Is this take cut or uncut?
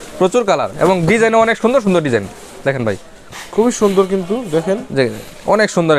uncut